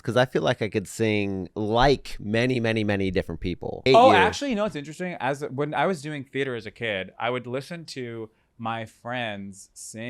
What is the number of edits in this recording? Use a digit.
2